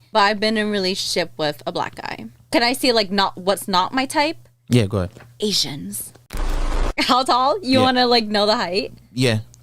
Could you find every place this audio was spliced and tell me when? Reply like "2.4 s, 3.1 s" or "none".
2.4 s, 6.4 s